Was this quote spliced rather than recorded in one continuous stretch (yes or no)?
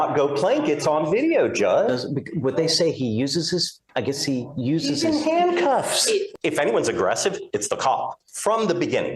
yes